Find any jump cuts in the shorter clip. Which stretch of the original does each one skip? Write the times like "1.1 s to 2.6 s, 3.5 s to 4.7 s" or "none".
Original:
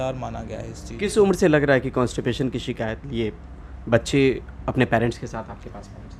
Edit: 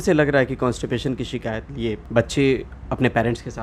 3.4 s to 3.8 s